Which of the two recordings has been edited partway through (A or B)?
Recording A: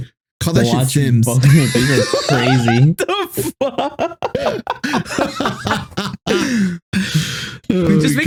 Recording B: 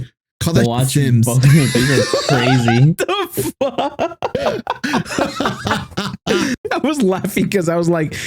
B